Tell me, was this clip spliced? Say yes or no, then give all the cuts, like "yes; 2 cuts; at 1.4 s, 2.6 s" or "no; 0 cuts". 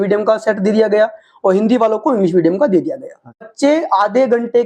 yes; 1 cut; at 3.5 s